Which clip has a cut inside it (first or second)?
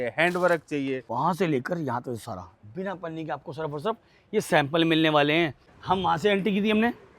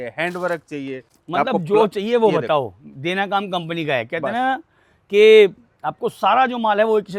first